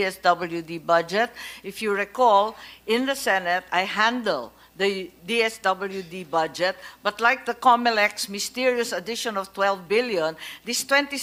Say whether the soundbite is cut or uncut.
uncut